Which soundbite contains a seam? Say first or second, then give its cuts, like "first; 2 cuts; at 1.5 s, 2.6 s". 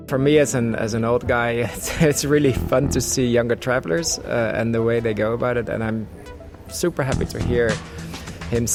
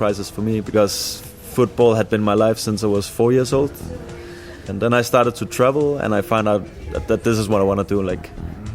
second; 3 cuts; at 0.7 s, 4.7 s, 6.3 s